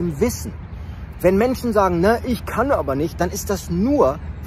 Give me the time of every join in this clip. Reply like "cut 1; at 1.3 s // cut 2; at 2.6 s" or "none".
none